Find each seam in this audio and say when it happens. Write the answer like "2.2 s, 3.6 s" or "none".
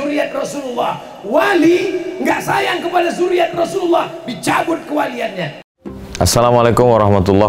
5.7 s